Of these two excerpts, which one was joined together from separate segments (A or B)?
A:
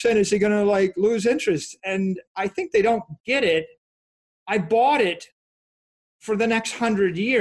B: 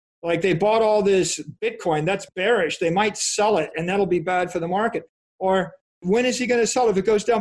B